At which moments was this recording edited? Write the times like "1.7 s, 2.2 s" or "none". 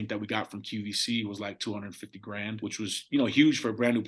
2.6 s